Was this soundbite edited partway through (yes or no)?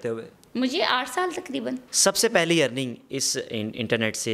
yes